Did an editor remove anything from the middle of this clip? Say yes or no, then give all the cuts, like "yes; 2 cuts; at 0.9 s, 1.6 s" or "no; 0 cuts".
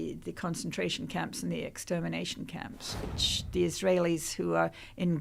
yes; 1 cut; at 3.1 s